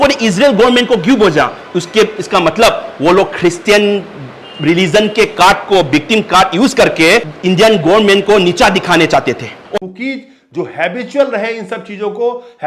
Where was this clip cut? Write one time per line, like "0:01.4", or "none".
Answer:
0:09.5

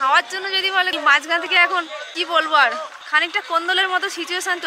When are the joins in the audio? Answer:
0:00.9
0:02.9

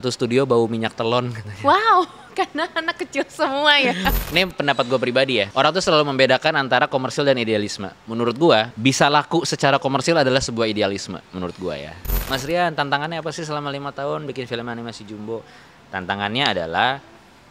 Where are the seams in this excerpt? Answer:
0:04.1
0:05.5
0:08.7
0:12.1

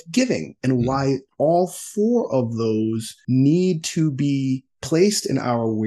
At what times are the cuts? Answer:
0:03.1
0:04.7

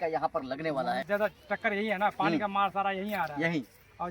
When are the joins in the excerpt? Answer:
0:01.0

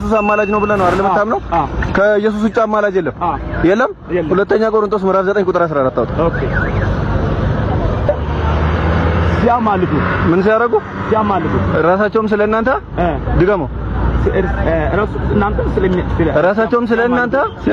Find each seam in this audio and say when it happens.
0:08.1

